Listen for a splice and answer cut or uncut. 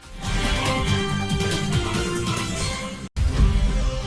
cut